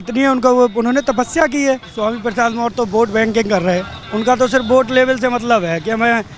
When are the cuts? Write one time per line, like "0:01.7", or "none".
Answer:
0:01.9
0:04.0